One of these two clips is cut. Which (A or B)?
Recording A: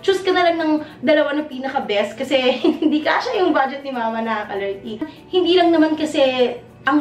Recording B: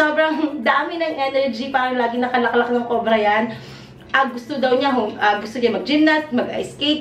A